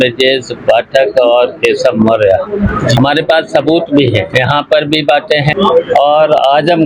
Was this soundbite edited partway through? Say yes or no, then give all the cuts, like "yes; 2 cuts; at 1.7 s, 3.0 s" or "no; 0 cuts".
yes; 3 cuts; at 3.0 s, 4.3 s, 5.5 s